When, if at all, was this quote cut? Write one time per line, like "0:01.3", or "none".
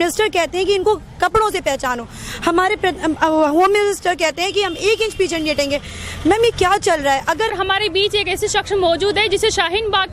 0:07.5